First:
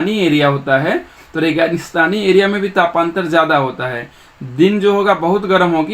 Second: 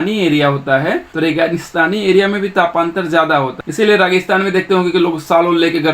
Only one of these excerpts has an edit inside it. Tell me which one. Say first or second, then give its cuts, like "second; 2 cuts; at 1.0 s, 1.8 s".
second; 2 cuts; at 1.1 s, 3.6 s